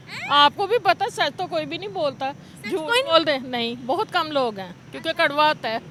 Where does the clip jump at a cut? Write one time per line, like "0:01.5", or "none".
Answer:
none